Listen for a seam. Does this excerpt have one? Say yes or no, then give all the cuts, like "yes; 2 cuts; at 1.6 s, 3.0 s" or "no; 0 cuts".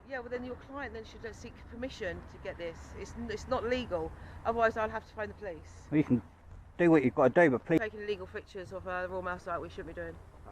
yes; 2 cuts; at 2.8 s, 7.8 s